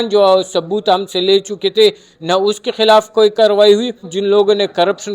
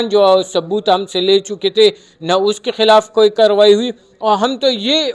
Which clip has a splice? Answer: first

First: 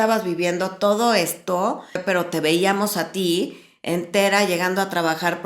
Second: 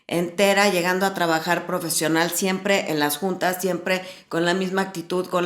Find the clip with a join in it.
first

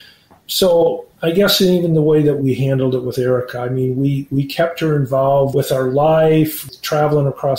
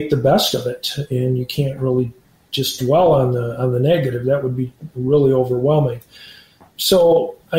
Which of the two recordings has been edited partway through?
first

